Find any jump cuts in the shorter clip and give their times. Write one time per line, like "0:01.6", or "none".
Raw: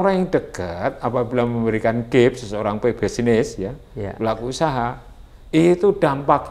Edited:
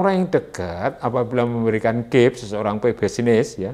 none